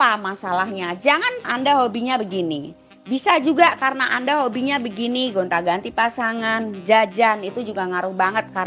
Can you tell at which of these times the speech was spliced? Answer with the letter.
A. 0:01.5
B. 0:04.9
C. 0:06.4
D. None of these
A